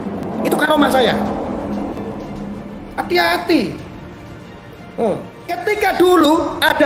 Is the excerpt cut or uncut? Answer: uncut